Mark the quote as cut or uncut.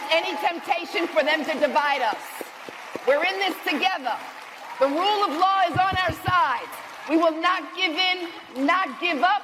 uncut